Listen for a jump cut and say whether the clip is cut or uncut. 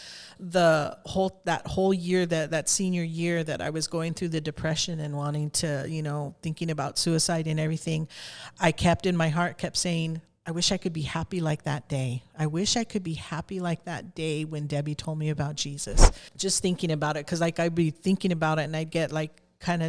cut